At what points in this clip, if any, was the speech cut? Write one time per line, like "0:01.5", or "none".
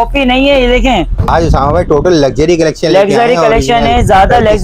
0:01.3